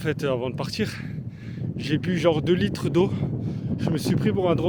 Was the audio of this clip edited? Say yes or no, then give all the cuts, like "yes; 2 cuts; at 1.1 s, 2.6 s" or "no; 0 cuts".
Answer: no; 0 cuts